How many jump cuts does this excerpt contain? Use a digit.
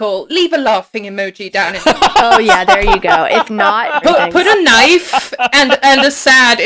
1